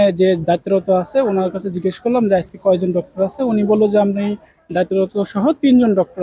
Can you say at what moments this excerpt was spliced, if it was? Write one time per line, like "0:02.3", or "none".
none

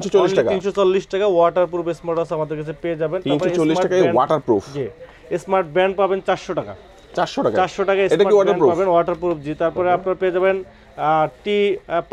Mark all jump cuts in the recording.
none

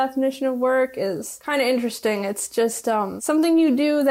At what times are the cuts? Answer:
0:03.2

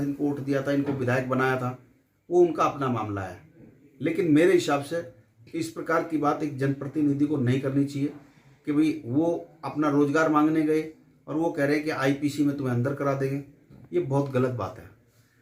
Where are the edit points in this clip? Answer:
none

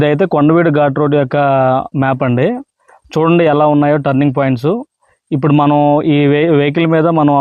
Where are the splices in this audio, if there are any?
none

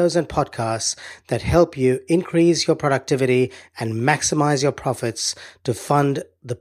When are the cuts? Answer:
none

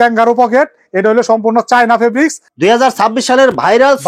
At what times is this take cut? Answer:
0:02.4

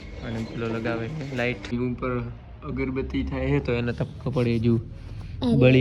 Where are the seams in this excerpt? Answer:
0:01.6

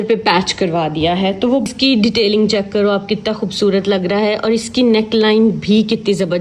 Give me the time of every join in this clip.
0:01.7

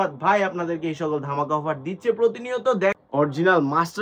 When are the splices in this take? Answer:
0:03.0

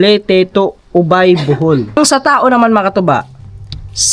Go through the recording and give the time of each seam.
0:01.9

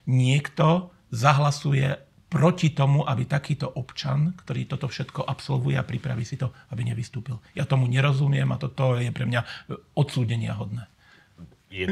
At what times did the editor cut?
none

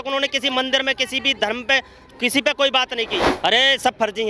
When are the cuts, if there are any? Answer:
0:03.2

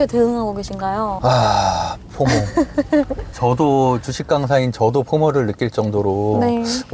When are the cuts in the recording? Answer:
none

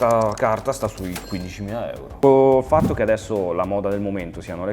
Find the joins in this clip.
0:02.0

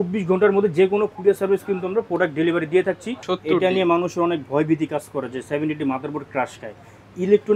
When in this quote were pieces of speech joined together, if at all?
0:03.1

